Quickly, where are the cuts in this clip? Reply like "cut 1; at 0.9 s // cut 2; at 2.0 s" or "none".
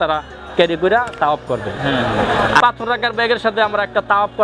cut 1; at 2.6 s